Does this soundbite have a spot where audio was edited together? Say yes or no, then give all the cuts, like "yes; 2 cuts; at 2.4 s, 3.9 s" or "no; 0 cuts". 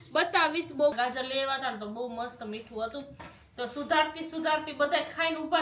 yes; 1 cut; at 0.9 s